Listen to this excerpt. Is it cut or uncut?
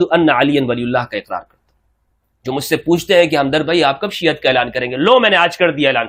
uncut